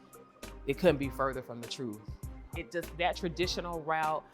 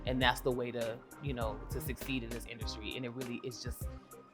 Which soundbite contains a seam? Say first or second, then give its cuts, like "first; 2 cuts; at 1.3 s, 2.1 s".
first; 1 cut; at 2.5 s